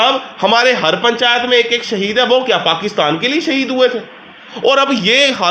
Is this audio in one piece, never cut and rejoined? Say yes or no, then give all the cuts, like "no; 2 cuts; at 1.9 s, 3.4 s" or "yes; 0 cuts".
yes; 0 cuts